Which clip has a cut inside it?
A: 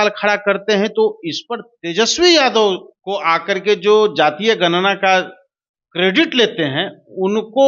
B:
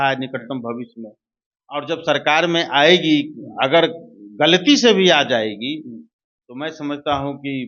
A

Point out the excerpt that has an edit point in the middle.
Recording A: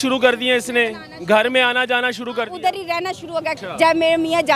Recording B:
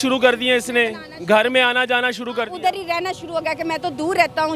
A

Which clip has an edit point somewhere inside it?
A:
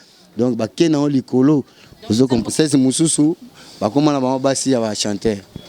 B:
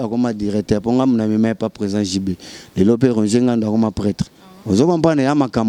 A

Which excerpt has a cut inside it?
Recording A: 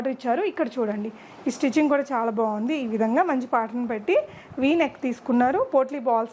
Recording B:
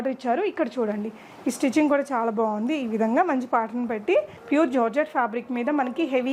B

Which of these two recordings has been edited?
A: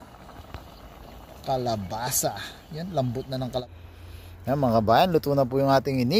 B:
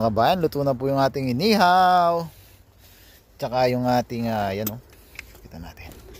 A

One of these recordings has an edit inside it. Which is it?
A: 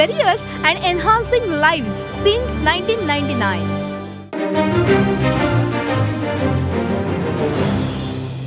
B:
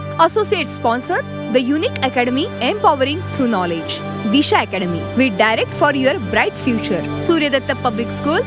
A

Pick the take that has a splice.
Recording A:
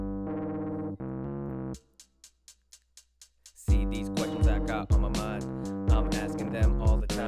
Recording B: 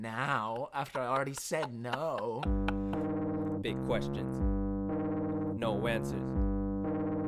B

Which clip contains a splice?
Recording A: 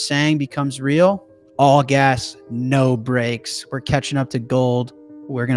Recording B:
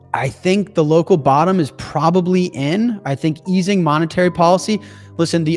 A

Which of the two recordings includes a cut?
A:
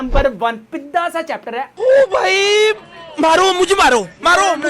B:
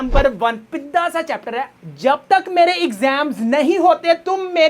B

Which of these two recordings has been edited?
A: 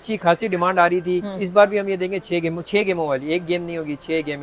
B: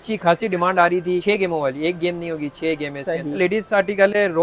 B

